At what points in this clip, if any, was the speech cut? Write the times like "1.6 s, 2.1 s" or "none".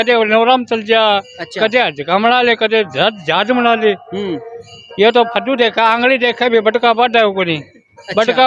none